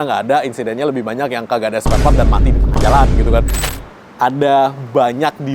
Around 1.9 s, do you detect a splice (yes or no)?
no